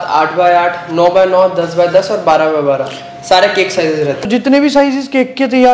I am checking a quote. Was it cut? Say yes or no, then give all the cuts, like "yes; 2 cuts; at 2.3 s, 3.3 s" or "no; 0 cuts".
no; 0 cuts